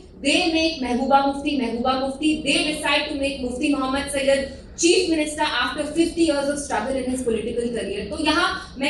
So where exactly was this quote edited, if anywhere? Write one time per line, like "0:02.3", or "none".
none